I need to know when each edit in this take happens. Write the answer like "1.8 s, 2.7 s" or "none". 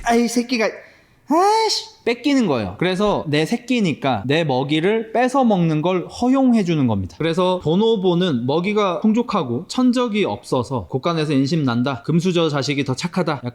2.7 s, 7.1 s